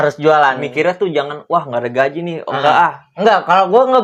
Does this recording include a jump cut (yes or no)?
no